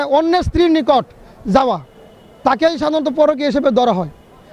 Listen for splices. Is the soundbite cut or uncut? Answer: uncut